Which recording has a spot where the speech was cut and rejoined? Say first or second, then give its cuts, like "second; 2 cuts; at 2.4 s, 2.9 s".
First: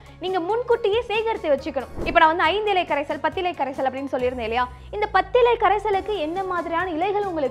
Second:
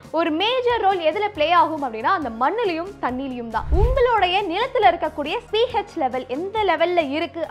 second; 2 cuts; at 3.7 s, 5.4 s